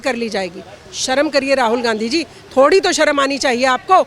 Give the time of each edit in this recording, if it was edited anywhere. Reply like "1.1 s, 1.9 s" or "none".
none